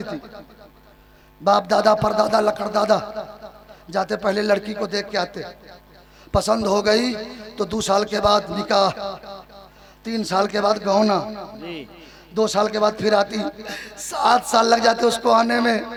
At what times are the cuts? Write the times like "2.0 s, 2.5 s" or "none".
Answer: none